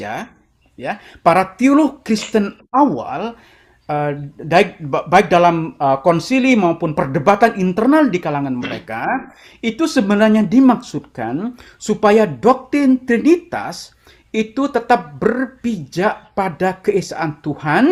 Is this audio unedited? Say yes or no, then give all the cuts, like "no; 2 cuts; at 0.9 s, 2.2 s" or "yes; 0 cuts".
yes; 0 cuts